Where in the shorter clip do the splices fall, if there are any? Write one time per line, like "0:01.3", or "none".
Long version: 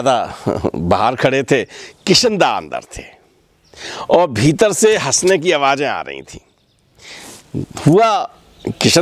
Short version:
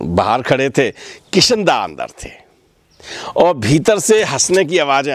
none